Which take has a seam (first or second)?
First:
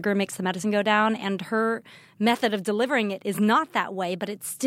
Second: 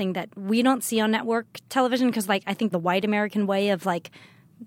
second